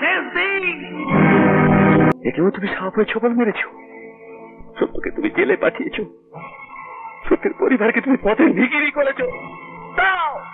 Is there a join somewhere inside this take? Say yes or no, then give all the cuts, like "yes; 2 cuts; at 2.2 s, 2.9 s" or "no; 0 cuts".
yes; 1 cut; at 2.1 s